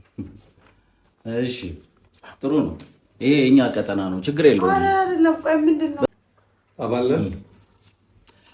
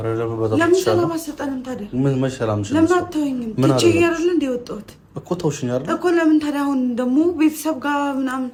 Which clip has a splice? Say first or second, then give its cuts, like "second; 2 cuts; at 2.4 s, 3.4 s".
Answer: first; 1 cut; at 6.0 s